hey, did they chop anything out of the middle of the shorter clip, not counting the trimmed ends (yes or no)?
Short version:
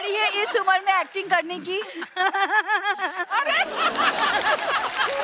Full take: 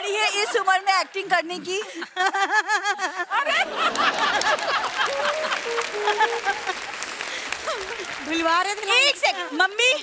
no